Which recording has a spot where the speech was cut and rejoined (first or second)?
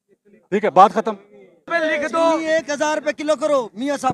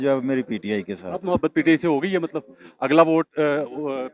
first